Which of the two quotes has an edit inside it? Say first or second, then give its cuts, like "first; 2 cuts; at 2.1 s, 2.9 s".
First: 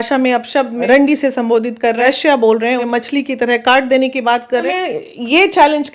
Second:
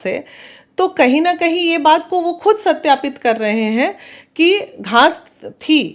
first; 4 cuts; at 0.8 s, 2.0 s, 2.8 s, 4.6 s